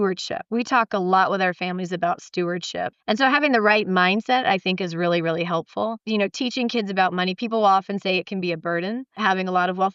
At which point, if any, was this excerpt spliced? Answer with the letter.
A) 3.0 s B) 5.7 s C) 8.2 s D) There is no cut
A